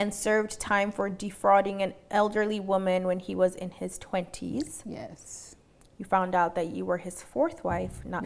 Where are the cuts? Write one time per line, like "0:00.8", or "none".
none